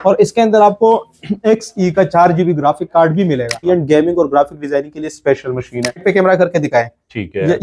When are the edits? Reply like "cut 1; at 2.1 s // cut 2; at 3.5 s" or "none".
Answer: cut 1; at 3.7 s // cut 2; at 6.0 s